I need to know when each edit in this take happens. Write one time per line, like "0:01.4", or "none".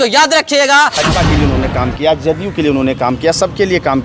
0:01.0